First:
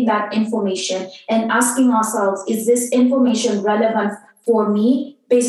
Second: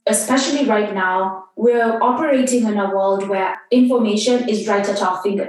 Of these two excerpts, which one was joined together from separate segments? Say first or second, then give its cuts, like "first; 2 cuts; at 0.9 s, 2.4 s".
second; 2 cuts; at 1.5 s, 3.5 s